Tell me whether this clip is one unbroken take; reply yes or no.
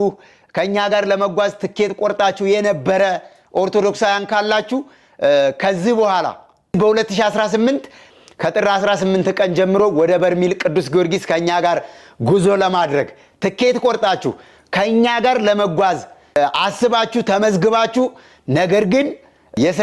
no